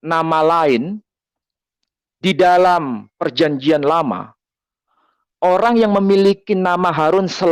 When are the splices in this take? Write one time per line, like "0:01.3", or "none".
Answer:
none